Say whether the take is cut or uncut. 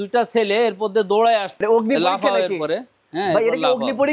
cut